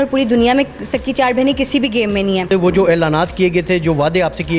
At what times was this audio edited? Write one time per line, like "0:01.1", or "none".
0:02.5